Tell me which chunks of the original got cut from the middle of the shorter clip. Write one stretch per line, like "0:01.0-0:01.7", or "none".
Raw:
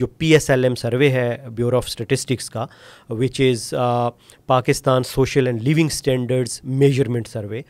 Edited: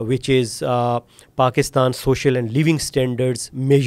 none